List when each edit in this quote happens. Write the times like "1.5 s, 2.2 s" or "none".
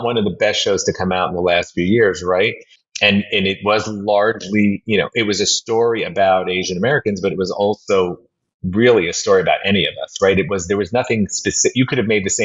none